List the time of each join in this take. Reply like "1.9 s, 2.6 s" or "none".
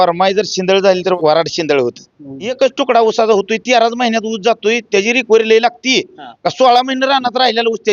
1.1 s, 2.5 s